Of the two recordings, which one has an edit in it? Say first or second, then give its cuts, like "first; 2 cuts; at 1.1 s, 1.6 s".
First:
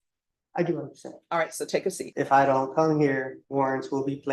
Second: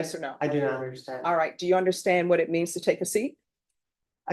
first; 2 cuts; at 2.0 s, 3.4 s